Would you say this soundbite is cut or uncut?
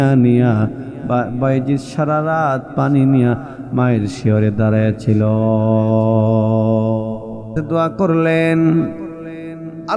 cut